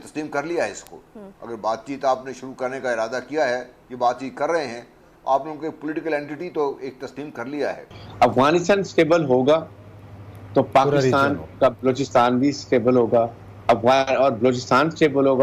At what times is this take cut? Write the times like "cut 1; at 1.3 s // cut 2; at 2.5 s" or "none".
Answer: cut 1; at 7.8 s